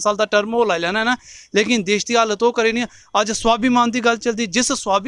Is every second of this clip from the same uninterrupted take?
yes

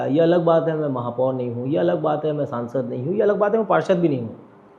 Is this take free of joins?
yes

